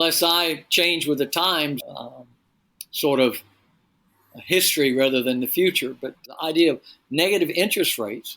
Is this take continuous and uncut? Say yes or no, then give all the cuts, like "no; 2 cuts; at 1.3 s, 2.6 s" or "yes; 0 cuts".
no; 1 cut; at 6.3 s